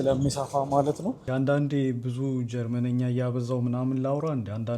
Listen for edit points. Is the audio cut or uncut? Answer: cut